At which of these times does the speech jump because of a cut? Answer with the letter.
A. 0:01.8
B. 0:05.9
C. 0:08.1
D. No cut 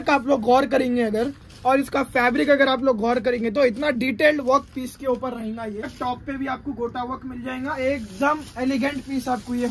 B